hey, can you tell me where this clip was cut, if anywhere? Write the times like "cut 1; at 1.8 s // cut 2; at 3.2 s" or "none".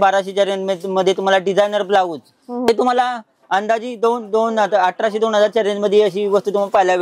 cut 1; at 2.7 s